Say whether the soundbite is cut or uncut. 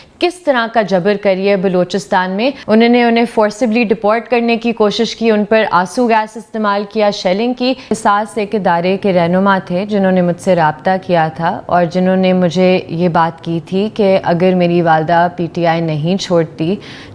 cut